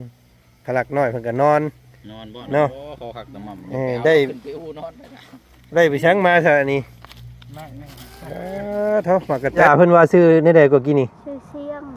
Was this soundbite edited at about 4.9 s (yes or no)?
no